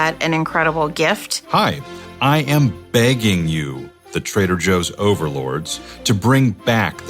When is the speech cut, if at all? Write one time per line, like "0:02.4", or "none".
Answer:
0:01.3